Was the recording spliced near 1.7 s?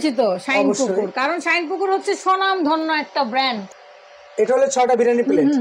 no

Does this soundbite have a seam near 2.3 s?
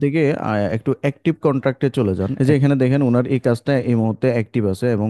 yes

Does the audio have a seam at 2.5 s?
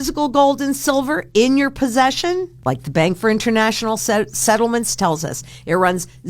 yes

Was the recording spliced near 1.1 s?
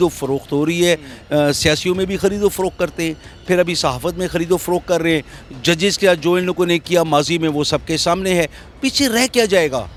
no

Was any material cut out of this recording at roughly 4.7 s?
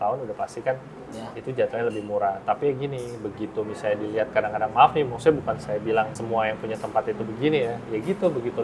no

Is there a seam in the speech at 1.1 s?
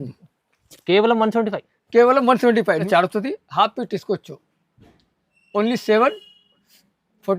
no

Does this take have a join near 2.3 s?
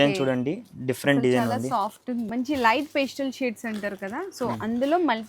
yes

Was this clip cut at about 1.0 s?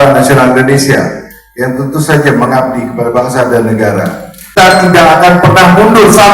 no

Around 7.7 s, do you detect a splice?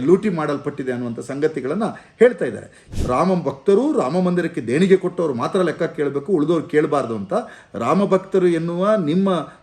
no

